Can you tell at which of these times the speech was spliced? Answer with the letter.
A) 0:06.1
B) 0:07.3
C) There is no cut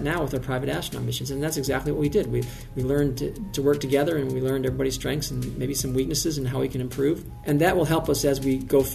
B